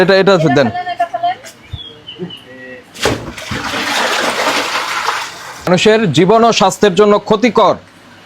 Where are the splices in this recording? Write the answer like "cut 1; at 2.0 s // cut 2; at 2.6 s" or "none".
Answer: cut 1; at 5.7 s